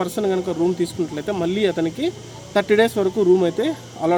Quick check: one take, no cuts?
yes; 0 cuts

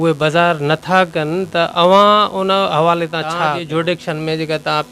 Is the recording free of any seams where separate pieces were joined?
no; 1 cut; at 3.6 s

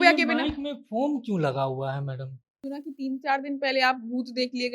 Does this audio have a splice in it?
yes; 1 cut; at 2.6 s

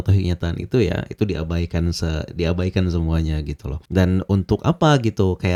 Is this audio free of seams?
yes; 0 cuts

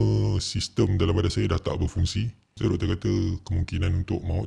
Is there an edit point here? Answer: yes; 1 cut; at 2.5 s

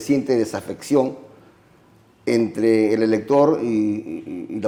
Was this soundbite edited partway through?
no; 0 cuts

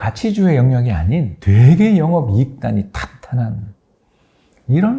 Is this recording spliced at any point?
yes; 1 cut; at 1.4 s

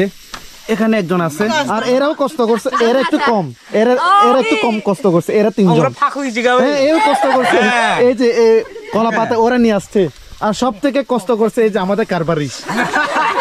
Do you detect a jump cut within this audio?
yes; 1 cut; at 1.5 s

